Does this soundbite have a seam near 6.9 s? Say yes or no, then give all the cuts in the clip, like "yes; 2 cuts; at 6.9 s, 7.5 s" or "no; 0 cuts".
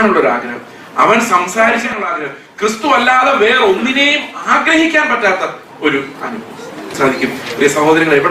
yes; 1 cut; at 6.9 s